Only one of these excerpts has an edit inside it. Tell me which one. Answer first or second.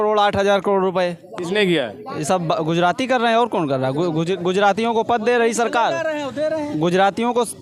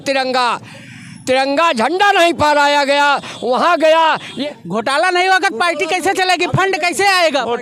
second